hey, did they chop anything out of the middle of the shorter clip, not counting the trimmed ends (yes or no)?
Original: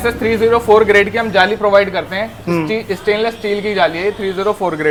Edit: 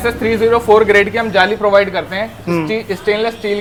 no